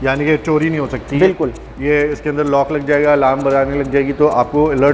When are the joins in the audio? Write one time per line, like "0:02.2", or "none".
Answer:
none